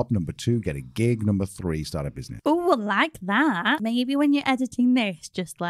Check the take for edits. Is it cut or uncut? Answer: cut